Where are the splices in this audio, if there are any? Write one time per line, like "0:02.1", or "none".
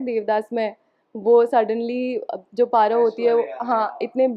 none